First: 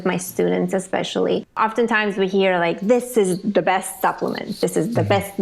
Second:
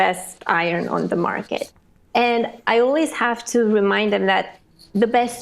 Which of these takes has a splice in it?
first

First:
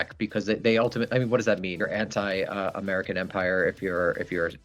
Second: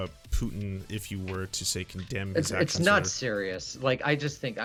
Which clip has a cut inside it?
first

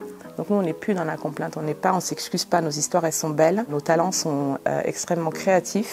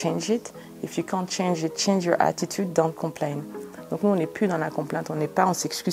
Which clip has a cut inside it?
first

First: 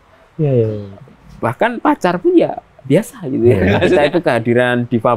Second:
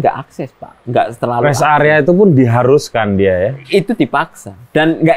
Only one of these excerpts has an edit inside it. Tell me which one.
first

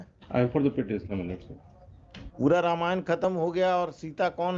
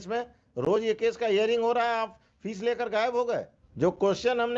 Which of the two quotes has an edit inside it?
second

